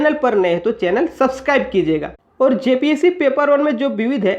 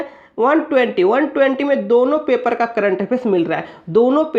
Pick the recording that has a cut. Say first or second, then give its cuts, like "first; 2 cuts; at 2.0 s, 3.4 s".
first; 1 cut; at 2.2 s